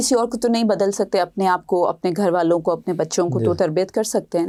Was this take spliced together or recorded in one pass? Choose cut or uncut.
uncut